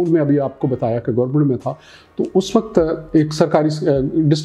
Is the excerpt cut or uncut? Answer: uncut